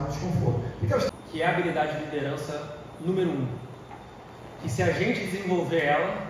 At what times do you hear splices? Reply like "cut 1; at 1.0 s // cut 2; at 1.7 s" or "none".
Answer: cut 1; at 1.1 s